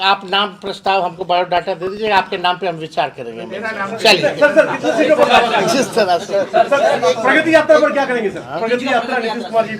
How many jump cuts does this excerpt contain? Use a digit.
0